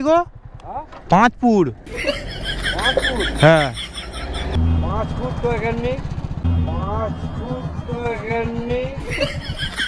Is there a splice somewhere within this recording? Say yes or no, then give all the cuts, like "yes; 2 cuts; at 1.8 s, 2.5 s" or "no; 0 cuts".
yes; 1 cut; at 4.5 s